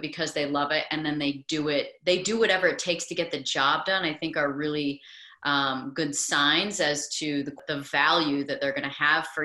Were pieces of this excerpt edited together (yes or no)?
yes